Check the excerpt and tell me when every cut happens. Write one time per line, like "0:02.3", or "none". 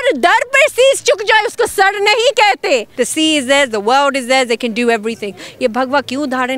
0:02.9